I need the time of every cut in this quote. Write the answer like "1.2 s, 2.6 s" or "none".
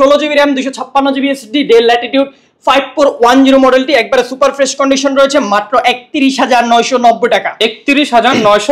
none